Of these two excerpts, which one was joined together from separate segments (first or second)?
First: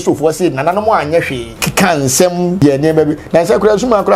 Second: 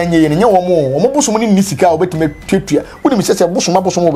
first